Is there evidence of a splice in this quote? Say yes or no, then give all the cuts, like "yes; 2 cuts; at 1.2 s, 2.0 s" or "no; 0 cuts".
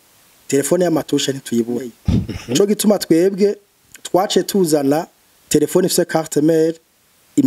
yes; 1 cut; at 2.3 s